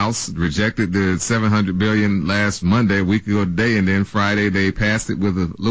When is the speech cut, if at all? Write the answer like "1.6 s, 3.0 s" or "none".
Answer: none